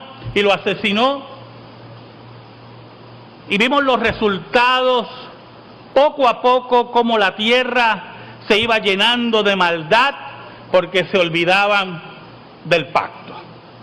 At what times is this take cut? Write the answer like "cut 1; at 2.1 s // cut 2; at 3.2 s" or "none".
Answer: cut 1; at 7.4 s